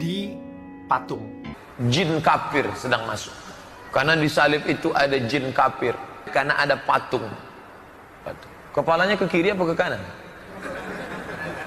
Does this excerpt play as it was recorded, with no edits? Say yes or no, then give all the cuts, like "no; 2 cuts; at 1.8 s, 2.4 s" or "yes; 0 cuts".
no; 2 cuts; at 1.4 s, 6.1 s